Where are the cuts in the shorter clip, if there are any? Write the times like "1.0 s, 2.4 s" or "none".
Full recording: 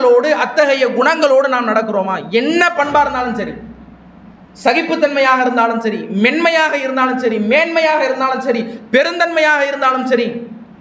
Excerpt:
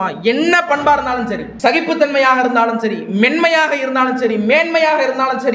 1.5 s